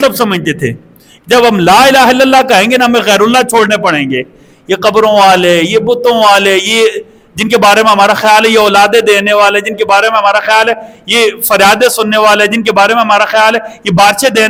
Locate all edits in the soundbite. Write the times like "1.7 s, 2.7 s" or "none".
none

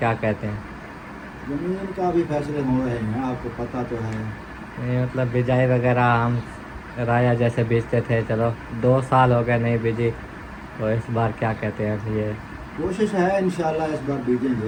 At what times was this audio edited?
none

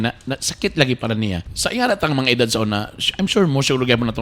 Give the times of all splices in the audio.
1.5 s

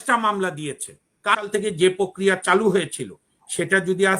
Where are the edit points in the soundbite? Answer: 1.4 s

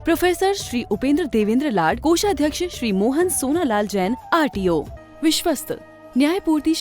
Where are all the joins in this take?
5.0 s

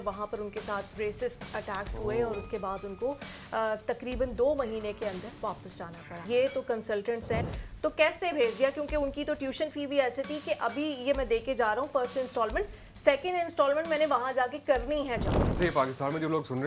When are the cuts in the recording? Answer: 0.9 s, 6.2 s, 7.5 s, 15.6 s

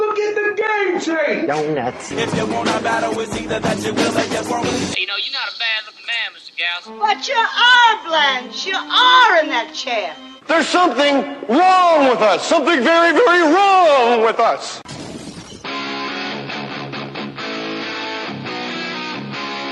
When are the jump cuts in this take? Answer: none

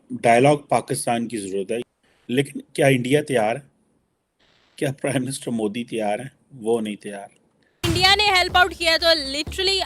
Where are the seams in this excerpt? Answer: 1.8 s, 7.8 s

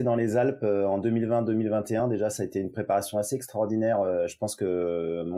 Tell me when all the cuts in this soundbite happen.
none

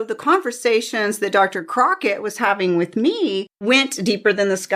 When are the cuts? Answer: 3.5 s

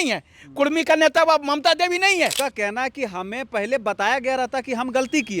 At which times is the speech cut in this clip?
2.4 s

